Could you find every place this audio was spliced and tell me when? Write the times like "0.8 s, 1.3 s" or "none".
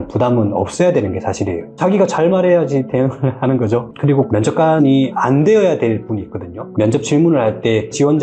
4.1 s, 6.6 s